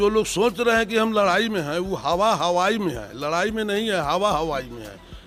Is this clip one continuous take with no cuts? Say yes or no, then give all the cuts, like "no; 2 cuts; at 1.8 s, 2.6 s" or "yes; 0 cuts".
yes; 0 cuts